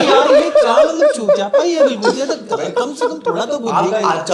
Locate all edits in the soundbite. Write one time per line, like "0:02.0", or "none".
none